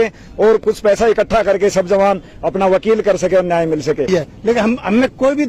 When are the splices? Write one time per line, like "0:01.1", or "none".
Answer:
0:04.1